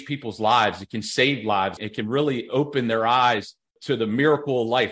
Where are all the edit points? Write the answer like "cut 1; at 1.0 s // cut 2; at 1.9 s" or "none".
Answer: cut 1; at 1.8 s // cut 2; at 3.7 s